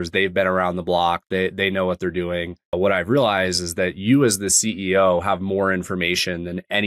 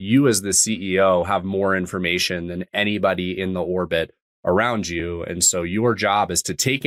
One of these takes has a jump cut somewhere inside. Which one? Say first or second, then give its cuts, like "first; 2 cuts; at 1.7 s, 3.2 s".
first; 1 cut; at 2.6 s